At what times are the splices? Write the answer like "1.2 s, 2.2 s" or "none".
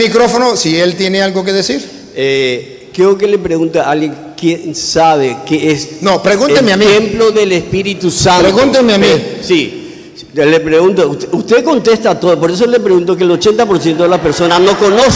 none